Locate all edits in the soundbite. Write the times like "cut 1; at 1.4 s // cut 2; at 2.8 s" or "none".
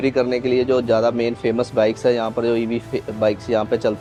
none